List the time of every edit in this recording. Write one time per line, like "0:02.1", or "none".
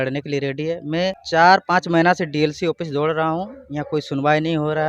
0:01.2